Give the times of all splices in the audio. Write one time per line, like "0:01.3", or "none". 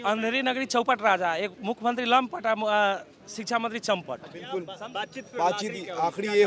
0:04.5